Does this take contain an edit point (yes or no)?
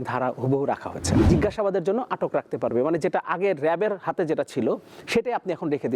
yes